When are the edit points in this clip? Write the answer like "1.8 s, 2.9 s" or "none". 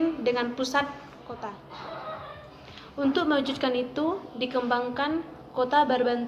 1.5 s